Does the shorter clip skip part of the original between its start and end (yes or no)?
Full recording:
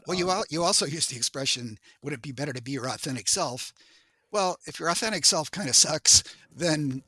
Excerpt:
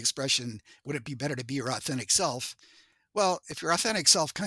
no